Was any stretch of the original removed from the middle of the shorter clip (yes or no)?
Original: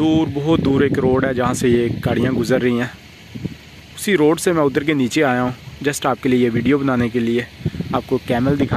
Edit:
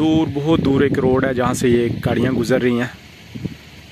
no